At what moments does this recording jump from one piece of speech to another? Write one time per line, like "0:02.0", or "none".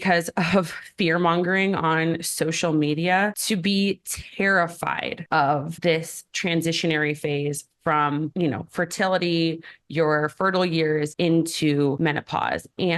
0:03.4
0:05.1
0:05.7
0:08.3
0:11.1
0:12.0